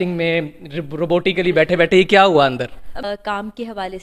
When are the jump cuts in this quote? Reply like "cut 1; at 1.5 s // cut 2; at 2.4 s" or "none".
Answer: cut 1; at 3.0 s

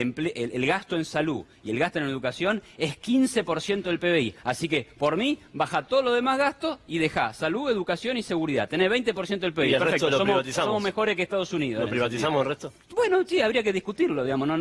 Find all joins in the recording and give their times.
none

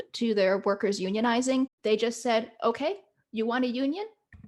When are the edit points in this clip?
cut 1; at 1.8 s

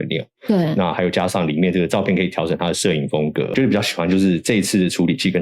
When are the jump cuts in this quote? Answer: cut 1; at 3.5 s

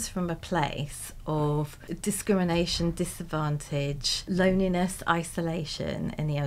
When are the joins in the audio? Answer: cut 1; at 1.8 s // cut 2; at 4.2 s

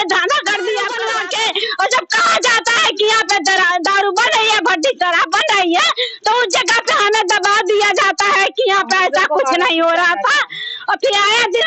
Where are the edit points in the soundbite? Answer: cut 1; at 1.0 s

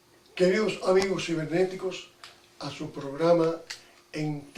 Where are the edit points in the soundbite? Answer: none

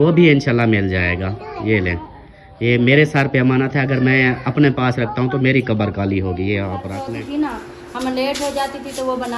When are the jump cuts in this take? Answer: cut 1; at 7.0 s

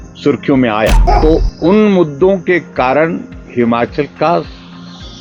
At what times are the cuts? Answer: cut 1; at 1.0 s

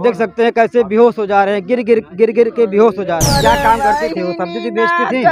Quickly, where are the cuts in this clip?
cut 1; at 3.3 s

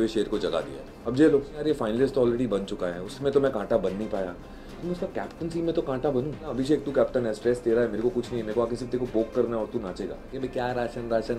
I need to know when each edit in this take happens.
cut 1; at 1.6 s // cut 2; at 6.4 s // cut 3; at 10.3 s

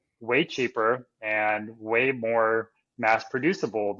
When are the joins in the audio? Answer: none

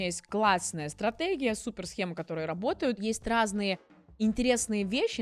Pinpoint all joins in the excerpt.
cut 1; at 3.0 s

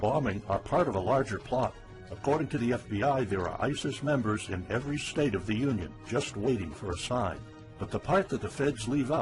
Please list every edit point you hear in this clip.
cut 1; at 2.8 s

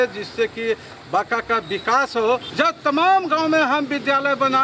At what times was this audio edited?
cut 1; at 2.5 s

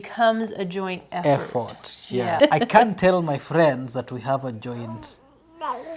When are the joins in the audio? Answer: cut 1; at 2.3 s

